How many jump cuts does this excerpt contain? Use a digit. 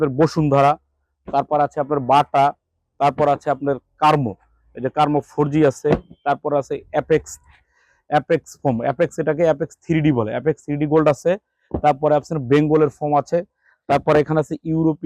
0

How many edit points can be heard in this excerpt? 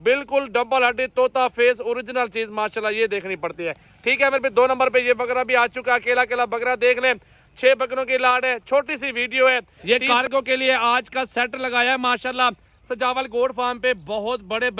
1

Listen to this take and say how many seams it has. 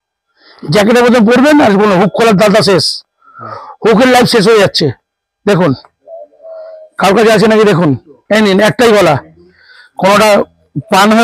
0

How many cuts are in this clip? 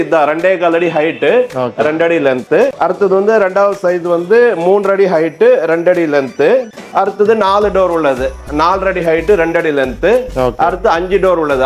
0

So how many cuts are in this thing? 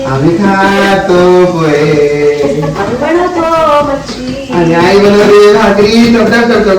0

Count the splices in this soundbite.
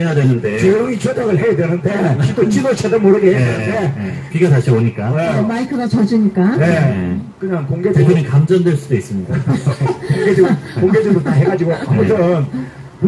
0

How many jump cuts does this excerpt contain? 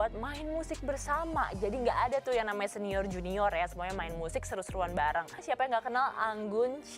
1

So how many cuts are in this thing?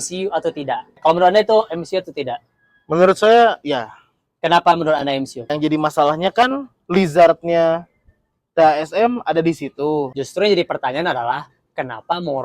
3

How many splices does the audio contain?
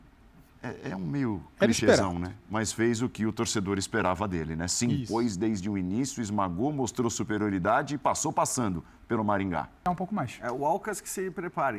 1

